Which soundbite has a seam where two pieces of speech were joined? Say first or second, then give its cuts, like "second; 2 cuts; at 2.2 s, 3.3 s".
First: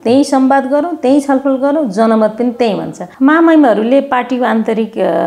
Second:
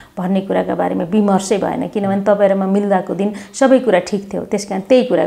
first; 1 cut; at 3.0 s